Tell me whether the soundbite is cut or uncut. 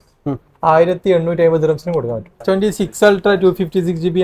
cut